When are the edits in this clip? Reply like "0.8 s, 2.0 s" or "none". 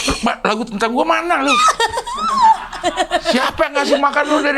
none